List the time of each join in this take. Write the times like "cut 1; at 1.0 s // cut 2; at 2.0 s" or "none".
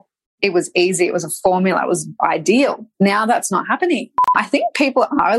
cut 1; at 2.8 s // cut 2; at 4.3 s